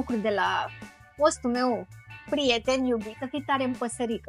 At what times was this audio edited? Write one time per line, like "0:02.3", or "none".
0:03.1